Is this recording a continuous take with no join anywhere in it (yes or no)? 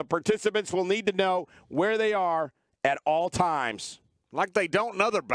yes